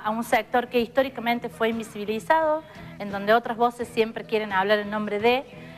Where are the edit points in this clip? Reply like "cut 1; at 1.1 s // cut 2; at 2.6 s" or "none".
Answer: cut 1; at 2.7 s

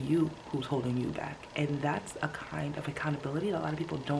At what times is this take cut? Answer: none

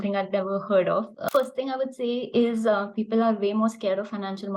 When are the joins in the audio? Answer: cut 1; at 1.2 s

